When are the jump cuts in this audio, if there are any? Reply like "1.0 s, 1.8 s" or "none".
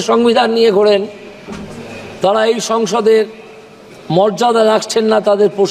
none